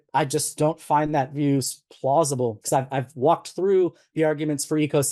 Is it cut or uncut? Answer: cut